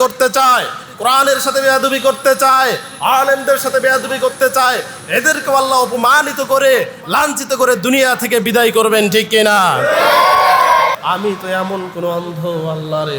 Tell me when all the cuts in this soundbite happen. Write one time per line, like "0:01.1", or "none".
0:11.0